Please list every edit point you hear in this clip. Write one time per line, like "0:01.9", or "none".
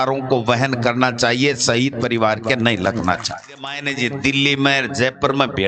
0:03.8